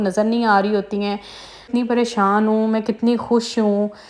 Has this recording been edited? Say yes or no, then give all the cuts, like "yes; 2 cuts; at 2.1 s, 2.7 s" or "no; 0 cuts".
yes; 1 cut; at 1.6 s